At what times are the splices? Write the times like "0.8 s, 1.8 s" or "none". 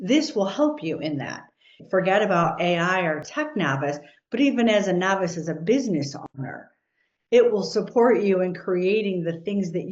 1.8 s